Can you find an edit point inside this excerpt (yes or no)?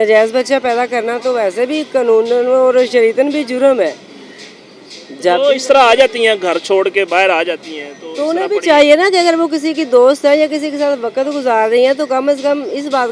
no